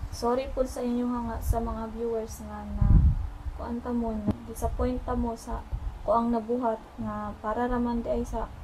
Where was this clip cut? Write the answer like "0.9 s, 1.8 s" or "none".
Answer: 4.3 s